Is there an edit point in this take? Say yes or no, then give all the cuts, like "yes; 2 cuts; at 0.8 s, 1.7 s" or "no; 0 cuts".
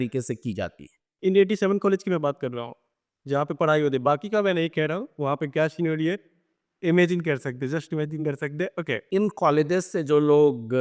yes; 2 cuts; at 1.1 s, 9.0 s